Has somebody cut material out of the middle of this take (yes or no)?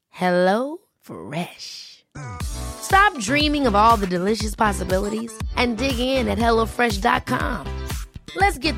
no